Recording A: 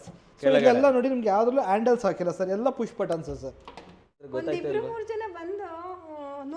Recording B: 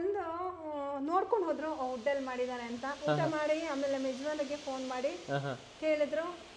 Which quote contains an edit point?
A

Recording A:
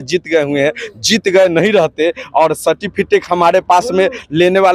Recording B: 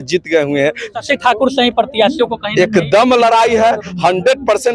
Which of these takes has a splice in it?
B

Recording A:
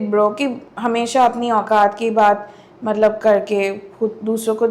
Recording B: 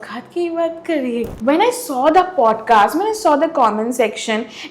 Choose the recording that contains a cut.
B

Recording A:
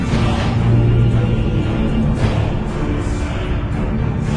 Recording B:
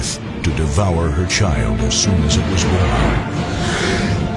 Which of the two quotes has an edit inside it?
A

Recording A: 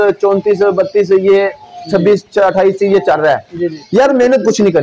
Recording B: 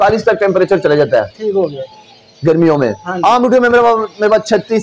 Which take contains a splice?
A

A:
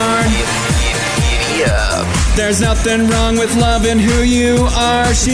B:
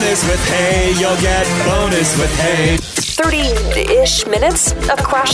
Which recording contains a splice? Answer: B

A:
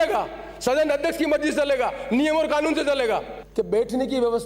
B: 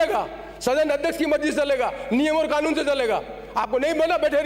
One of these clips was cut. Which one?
A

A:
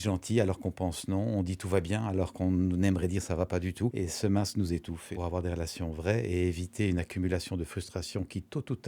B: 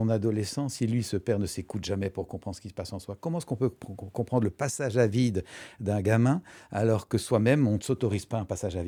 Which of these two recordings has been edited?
A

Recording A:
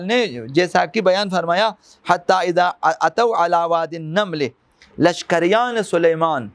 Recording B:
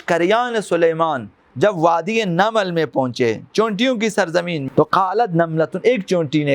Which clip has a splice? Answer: B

